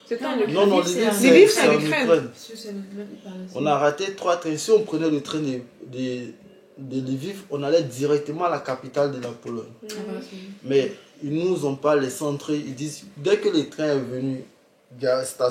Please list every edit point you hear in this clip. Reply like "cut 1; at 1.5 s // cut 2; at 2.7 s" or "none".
none